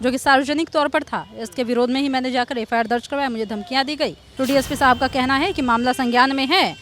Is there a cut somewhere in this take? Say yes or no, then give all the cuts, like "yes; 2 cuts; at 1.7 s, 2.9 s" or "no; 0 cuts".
yes; 1 cut; at 4.2 s